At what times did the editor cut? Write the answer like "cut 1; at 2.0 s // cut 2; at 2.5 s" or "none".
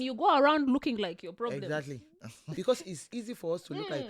cut 1; at 2.4 s

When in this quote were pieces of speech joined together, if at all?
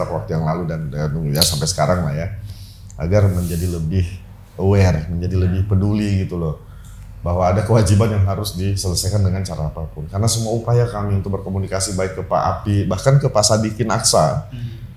none

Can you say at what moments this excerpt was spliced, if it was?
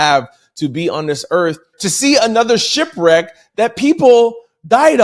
cut 1; at 1.8 s // cut 2; at 3.4 s

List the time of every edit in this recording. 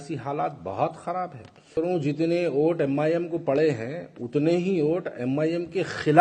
cut 1; at 1.7 s

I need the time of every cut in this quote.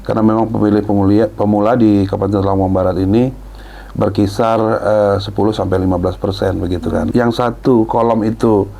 cut 1; at 7.1 s

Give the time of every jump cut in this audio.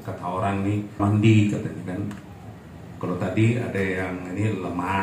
cut 1; at 1.0 s

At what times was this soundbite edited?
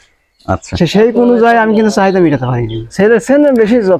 cut 1; at 2.9 s

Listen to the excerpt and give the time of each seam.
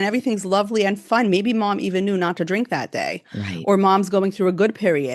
cut 1; at 1.0 s

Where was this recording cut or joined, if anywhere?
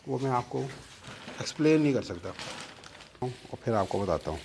cut 1; at 3.2 s

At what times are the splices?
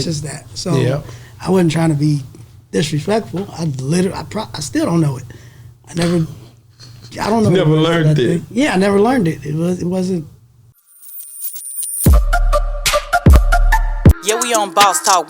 cut 1; at 10.7 s

